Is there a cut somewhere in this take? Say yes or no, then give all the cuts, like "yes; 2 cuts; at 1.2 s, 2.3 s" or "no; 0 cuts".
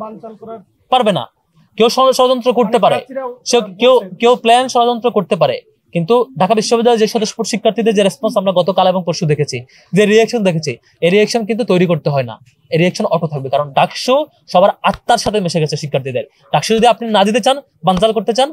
no; 0 cuts